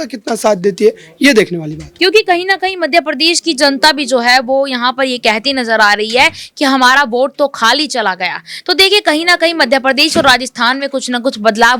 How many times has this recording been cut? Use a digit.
1